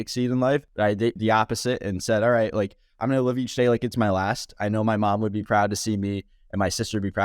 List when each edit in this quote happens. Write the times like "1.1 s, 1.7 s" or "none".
1.0 s